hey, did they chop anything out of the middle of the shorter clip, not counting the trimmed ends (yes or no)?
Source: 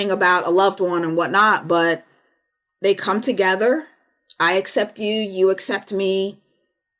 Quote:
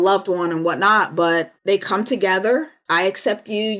yes